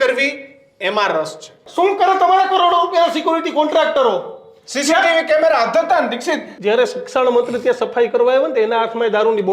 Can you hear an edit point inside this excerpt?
yes; 2 cuts; at 1.6 s, 6.5 s

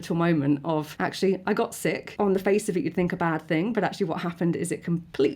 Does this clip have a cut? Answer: yes; 2 cuts; at 0.9 s, 2.1 s

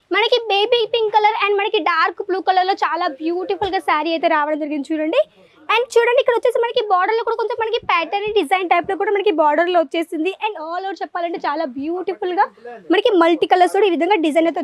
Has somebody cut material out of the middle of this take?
no; 0 cuts

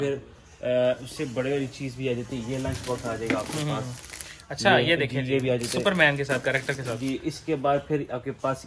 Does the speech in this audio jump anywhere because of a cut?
no; 0 cuts

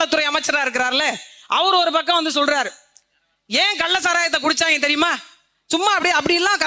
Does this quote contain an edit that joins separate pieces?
no; 0 cuts

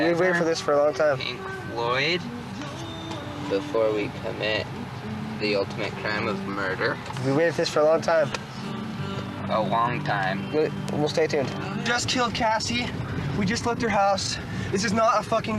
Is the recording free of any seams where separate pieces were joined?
no; 1 cut; at 7.1 s

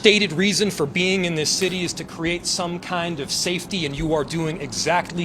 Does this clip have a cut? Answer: yes; 1 cut; at 2.5 s

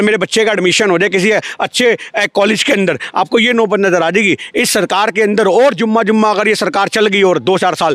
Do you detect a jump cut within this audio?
no; 0 cuts

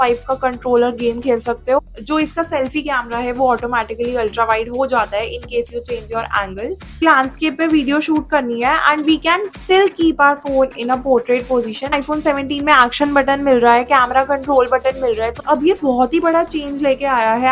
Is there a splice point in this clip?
yes; 4 cuts; at 1.8 s, 7.0 s, 11.9 s, 15.4 s

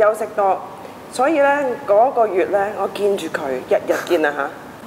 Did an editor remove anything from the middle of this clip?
no; 0 cuts

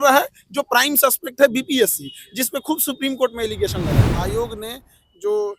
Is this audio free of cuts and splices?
no; 1 cut; at 4.1 s

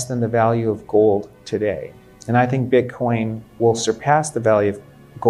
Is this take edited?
no; 0 cuts

